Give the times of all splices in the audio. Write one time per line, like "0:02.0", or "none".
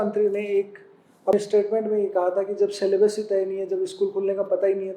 0:01.3